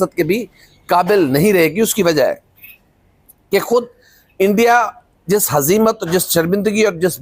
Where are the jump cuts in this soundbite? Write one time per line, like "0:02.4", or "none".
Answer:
none